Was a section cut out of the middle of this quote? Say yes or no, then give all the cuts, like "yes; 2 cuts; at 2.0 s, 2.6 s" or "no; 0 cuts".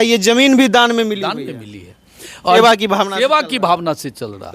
yes; 1 cut; at 2.6 s